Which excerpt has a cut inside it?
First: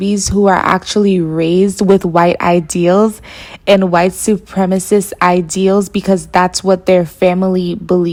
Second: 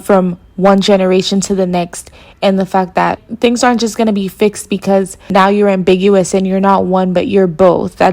second; 1 cut; at 5.2 s

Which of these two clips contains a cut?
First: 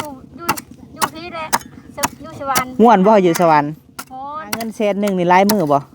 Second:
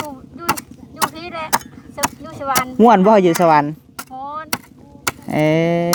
first; 1 cut; at 4.8 s

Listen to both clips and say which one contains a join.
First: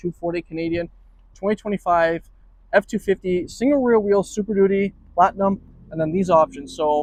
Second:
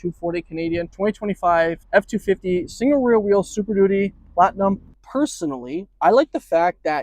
second; 3 cuts; at 0.9 s, 1.8 s, 5.0 s

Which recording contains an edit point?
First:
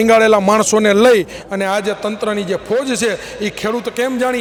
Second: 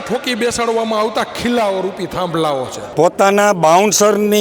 second; 1 cut; at 2.8 s

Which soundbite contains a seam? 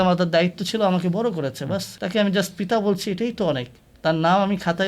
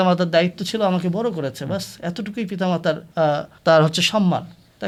first; 1 cut; at 1.9 s

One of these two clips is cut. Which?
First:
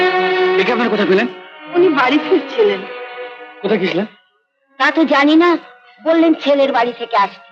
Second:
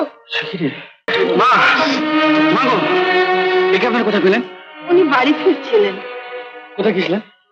second; 1 cut; at 1.1 s

